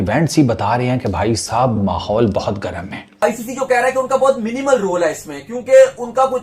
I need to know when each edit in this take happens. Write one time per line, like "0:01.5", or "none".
0:03.2